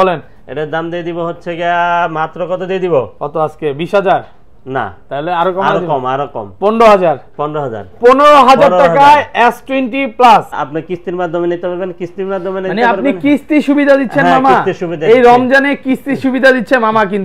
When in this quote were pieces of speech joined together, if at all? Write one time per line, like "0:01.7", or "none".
0:10.6